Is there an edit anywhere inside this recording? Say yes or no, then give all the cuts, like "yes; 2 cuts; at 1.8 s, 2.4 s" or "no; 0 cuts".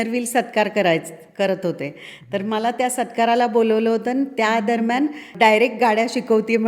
yes; 1 cut; at 5.3 s